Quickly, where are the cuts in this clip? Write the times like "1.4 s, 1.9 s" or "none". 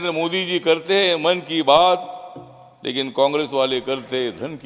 none